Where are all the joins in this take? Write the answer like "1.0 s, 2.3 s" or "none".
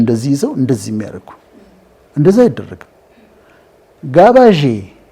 3.8 s